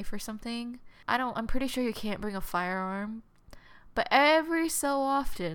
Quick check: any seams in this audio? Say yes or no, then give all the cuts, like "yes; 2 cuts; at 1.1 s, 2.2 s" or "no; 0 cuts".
yes; 1 cut; at 1.0 s